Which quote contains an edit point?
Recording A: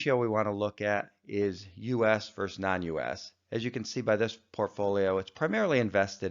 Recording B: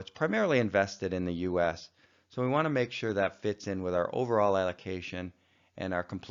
A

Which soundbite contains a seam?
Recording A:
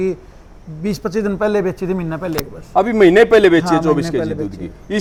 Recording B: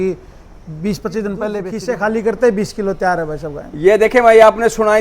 B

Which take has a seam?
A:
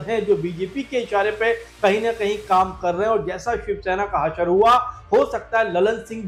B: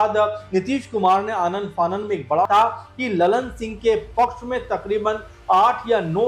B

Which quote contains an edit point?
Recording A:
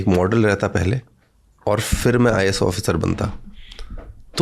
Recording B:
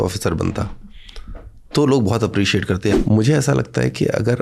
B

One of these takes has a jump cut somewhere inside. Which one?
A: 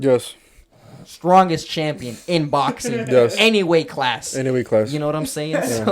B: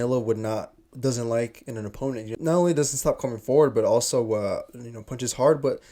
B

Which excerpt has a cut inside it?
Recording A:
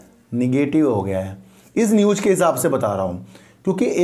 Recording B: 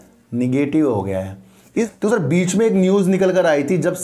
B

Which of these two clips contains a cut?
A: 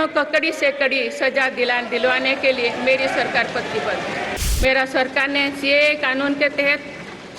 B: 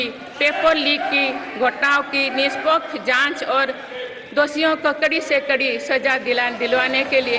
A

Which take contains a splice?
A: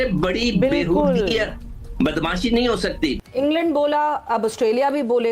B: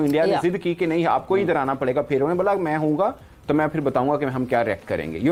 A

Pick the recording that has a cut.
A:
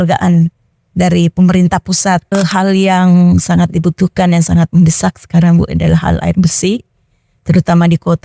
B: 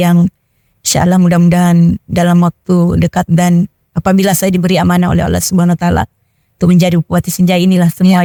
A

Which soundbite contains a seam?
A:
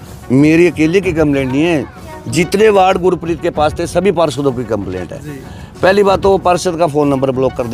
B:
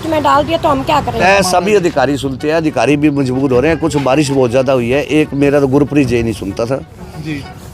B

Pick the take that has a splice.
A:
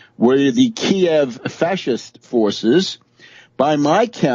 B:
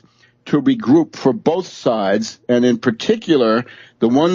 B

